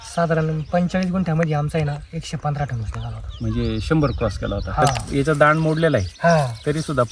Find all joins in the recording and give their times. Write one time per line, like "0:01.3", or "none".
0:05.0